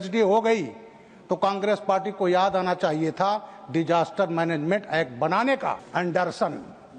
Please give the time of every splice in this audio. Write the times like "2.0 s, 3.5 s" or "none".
5.8 s